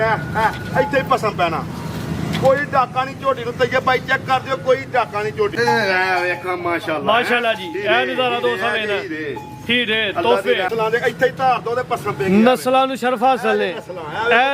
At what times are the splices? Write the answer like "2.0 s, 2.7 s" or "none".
5.5 s, 10.7 s